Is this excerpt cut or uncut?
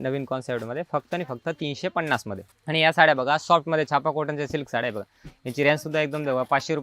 uncut